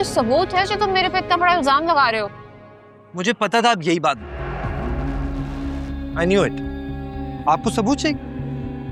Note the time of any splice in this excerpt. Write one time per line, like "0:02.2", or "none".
none